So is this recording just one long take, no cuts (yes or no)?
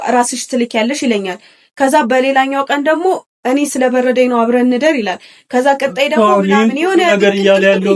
yes